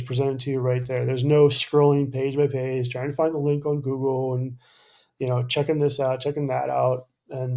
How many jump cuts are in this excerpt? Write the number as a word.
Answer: zero